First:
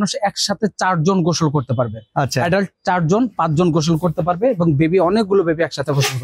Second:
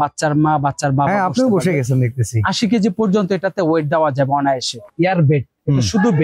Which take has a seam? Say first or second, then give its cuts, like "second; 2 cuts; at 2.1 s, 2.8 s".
second; 1 cut; at 4.8 s